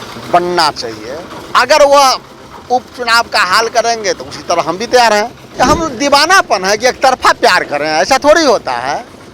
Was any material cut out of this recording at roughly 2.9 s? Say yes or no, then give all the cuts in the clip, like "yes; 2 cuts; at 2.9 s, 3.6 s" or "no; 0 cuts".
no; 1 cut; at 5.4 s